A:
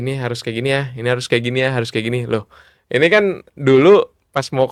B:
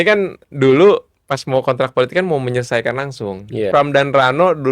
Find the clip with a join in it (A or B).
B